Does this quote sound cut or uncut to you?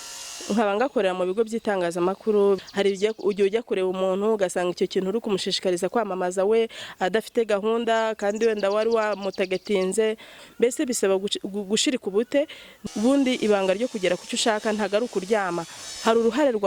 cut